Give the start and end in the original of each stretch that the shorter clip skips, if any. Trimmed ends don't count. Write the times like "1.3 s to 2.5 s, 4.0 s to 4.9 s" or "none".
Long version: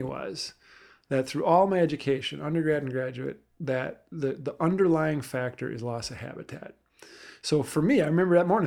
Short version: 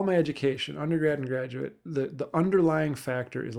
3.4 s to 4.1 s